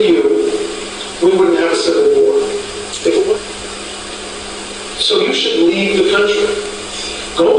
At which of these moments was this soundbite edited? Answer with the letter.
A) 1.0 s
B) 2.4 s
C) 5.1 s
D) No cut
B